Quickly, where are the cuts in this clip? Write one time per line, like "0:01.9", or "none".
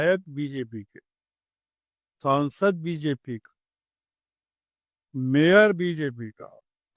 none